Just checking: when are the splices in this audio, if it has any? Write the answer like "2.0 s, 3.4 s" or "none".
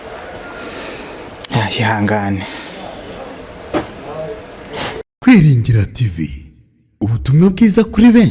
5.0 s